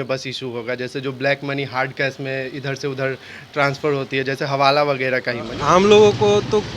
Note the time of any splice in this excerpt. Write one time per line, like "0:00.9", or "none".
0:05.5